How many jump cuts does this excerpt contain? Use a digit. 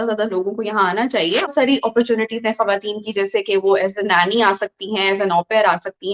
1